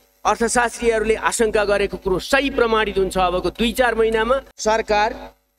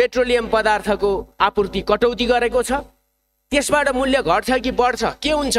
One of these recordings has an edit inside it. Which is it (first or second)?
first